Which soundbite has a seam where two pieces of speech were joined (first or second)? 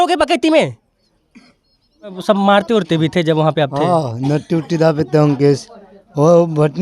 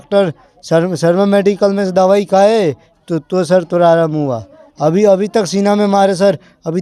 first